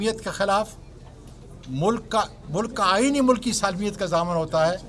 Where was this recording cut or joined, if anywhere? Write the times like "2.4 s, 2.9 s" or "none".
none